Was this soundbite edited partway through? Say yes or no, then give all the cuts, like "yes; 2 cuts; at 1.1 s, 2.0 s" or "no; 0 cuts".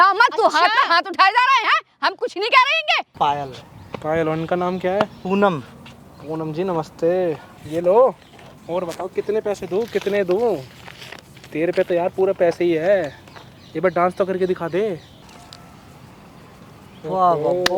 yes; 3 cuts; at 3.1 s, 7.5 s, 15.2 s